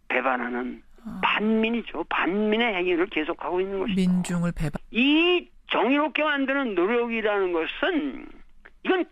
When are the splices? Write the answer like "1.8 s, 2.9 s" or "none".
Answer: 4.7 s

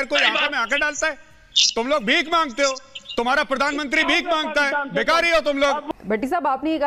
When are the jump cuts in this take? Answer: 5.9 s

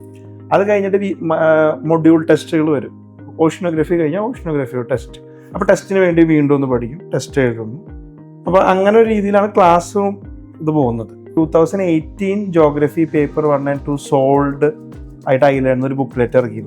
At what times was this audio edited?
11.3 s

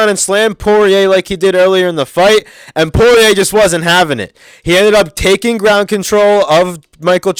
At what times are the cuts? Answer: none

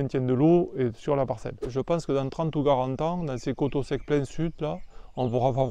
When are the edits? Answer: 1.6 s

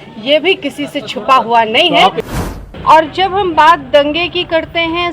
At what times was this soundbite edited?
2.2 s

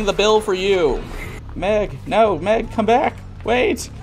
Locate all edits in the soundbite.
1.4 s

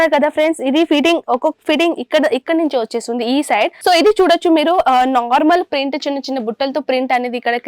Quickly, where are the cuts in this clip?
3.8 s

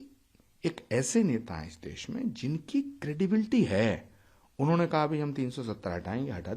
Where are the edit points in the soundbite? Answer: none

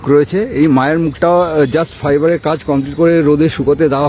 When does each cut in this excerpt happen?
none

